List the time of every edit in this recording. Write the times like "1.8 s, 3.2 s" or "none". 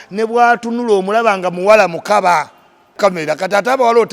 2.9 s